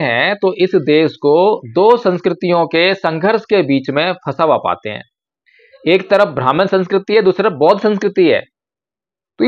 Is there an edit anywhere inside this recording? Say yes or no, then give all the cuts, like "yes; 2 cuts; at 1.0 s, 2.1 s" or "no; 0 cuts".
no; 0 cuts